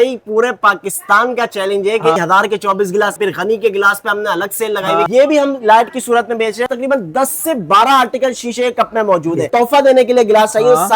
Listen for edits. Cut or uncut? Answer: cut